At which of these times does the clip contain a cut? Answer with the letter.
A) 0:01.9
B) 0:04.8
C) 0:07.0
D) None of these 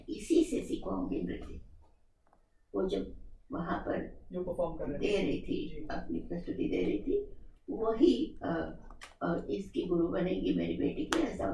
D